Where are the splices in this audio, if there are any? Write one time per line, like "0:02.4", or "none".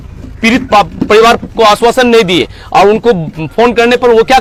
none